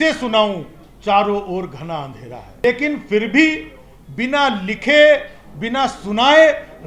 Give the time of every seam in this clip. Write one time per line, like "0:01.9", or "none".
0:02.6

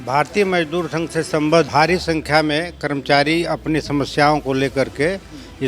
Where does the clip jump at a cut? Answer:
0:01.7

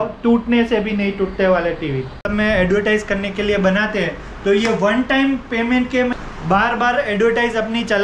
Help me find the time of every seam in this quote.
0:02.3
0:06.1

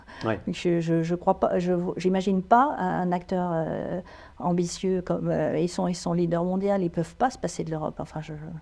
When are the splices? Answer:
none

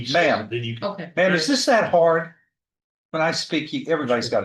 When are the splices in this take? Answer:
none

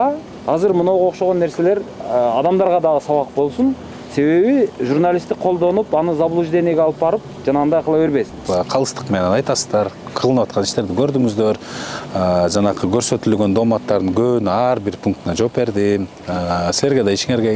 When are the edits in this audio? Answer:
0:08.4

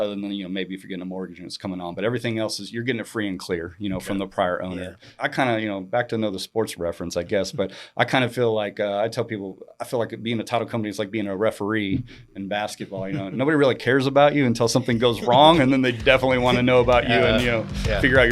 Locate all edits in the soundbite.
0:05.2

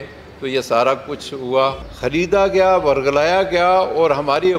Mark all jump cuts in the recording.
0:01.9

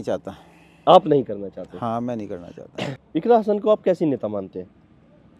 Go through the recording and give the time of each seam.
0:03.0

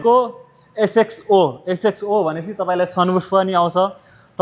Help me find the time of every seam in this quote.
none

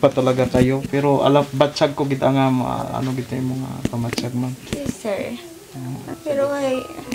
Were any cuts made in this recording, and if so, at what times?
0:06.1

